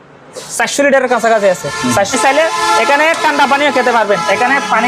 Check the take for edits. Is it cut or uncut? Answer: cut